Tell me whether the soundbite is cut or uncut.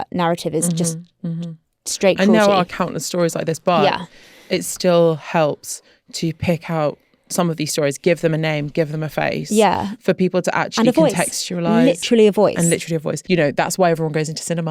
cut